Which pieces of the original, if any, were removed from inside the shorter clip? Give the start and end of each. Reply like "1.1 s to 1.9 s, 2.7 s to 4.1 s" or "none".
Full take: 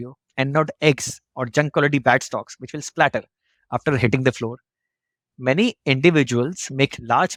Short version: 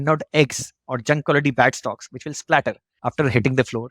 3.4 s to 3.6 s